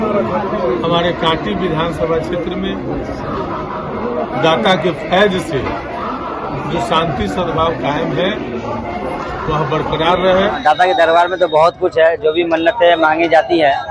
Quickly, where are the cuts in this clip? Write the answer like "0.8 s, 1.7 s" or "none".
10.6 s